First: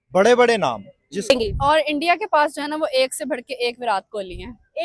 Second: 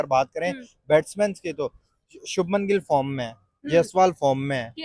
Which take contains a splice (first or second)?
first